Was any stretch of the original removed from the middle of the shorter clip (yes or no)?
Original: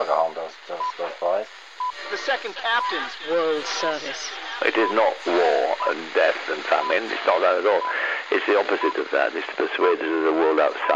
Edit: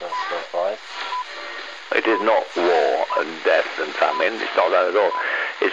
yes